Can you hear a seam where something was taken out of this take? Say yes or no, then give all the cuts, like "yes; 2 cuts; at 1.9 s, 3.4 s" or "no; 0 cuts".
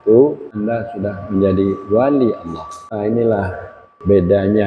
yes; 1 cut; at 2.9 s